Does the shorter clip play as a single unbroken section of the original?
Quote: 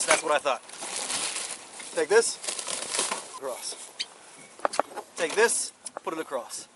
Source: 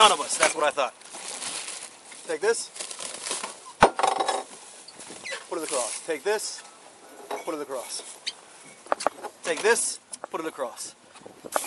no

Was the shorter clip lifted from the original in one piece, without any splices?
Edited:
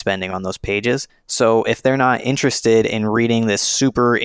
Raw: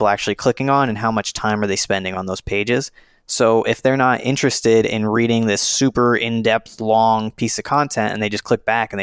no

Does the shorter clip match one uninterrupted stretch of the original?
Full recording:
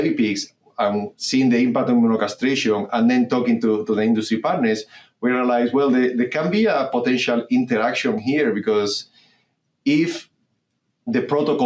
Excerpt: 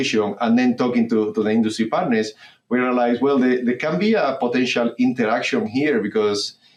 yes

